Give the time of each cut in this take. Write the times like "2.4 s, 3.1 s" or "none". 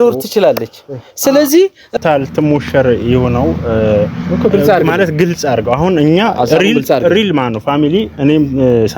1.9 s